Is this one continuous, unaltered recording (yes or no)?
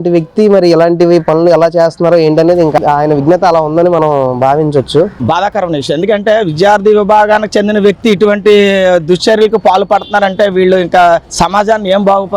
no